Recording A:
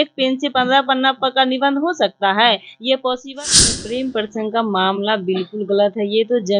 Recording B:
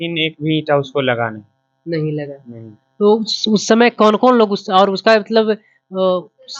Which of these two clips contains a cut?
A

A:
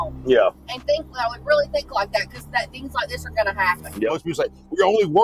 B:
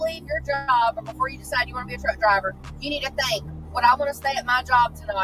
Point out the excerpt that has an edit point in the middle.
A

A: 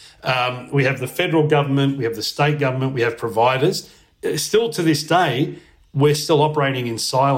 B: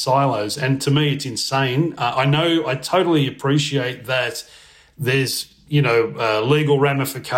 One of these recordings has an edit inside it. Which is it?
A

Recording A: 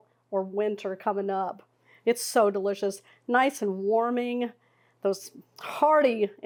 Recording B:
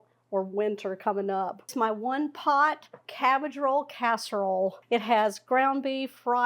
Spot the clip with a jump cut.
B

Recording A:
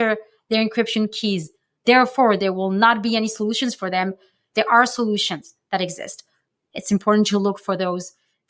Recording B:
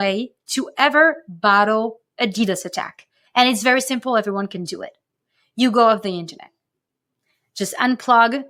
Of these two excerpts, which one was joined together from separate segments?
A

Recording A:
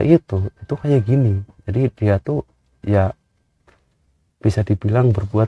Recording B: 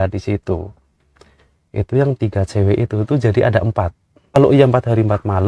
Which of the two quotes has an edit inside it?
B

